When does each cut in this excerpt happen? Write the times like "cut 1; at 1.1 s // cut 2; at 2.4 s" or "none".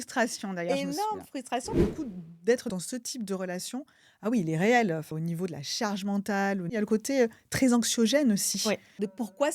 cut 1; at 1.8 s // cut 2; at 2.7 s // cut 3; at 5.1 s // cut 4; at 6.8 s